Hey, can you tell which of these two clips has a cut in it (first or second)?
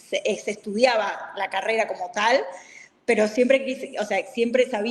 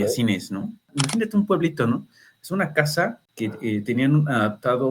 second